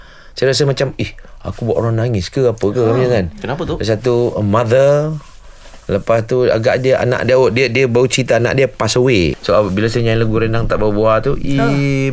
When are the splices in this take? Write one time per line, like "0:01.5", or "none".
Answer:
none